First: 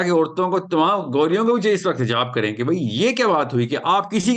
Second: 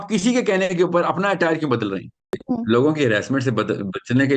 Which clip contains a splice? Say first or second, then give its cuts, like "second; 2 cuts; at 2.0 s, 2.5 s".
second; 1 cut; at 2.3 s